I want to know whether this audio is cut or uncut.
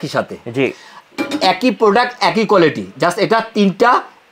uncut